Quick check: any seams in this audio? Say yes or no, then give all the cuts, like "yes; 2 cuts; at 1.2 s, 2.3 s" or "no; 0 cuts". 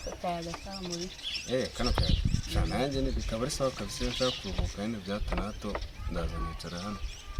no; 0 cuts